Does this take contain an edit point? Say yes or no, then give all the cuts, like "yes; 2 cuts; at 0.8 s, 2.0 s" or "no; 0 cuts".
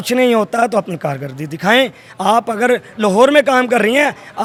no; 0 cuts